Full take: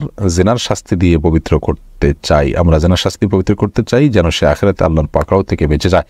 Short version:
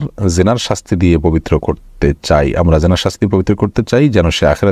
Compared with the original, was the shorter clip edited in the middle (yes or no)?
no